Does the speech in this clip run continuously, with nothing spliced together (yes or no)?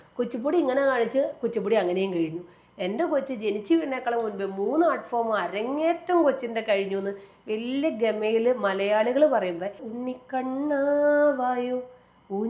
no